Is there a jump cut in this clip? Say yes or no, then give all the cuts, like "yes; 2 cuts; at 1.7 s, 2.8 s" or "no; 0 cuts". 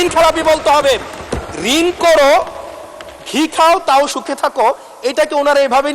yes; 1 cut; at 1.2 s